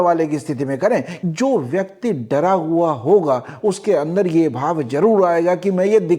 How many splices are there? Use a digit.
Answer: 1